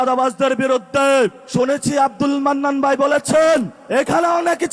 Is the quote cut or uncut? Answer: cut